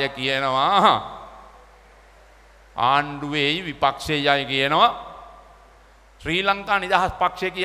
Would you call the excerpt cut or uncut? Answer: uncut